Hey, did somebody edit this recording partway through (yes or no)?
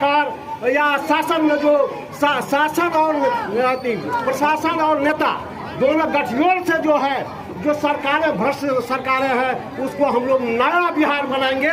no